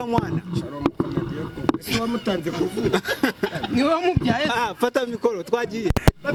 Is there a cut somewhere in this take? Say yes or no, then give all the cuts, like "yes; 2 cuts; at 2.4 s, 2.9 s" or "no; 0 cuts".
no; 0 cuts